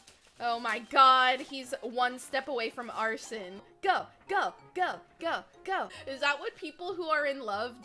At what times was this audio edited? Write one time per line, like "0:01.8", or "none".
0:03.7
0:06.0